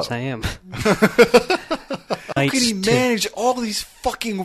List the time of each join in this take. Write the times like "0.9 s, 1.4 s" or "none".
2.3 s